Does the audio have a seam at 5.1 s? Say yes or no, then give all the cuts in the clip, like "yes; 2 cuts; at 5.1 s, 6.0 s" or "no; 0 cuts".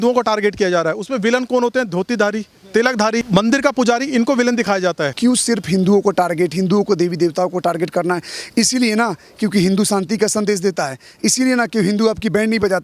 yes; 2 cuts; at 3.3 s, 5.1 s